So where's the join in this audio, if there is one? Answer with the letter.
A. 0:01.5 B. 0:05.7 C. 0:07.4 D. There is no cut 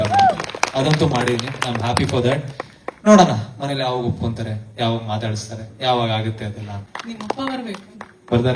C